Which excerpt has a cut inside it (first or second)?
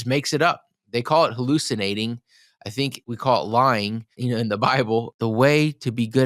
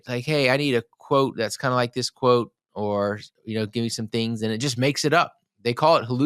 first